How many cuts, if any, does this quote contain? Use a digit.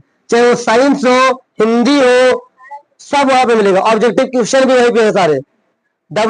0